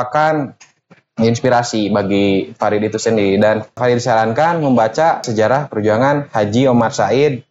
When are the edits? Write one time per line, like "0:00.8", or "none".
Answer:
0:03.8
0:05.3